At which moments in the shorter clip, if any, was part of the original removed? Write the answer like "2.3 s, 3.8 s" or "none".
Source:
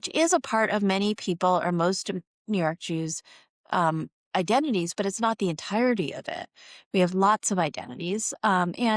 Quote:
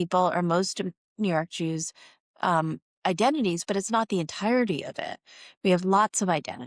none